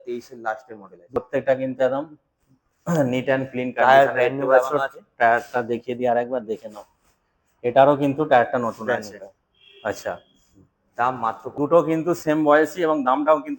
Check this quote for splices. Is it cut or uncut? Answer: cut